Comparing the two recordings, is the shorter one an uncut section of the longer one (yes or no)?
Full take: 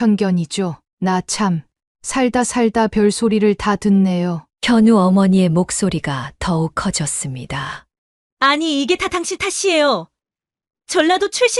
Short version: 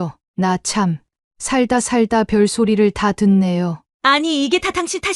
no